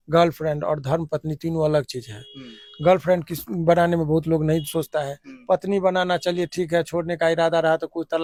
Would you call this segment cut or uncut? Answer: uncut